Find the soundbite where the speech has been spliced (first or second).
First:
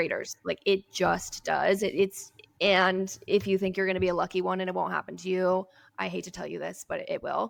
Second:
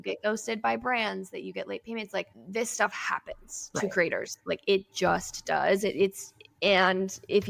second